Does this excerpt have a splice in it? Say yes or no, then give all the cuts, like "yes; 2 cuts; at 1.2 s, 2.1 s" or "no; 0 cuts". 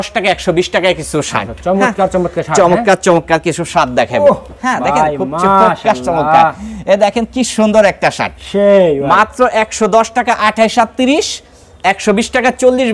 no; 0 cuts